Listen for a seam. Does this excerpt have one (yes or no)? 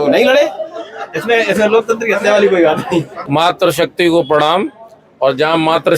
yes